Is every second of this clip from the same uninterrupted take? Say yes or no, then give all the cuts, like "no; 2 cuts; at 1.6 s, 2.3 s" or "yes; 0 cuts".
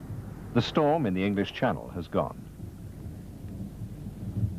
no; 1 cut; at 2.2 s